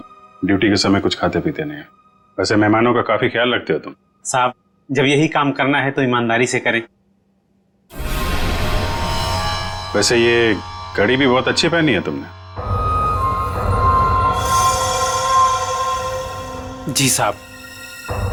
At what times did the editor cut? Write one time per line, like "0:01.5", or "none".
none